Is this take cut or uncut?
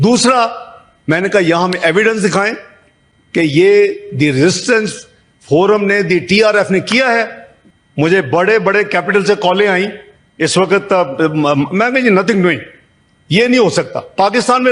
uncut